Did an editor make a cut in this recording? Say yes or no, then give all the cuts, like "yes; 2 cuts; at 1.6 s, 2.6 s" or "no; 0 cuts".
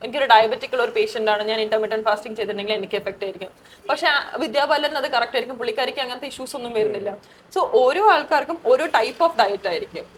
no; 0 cuts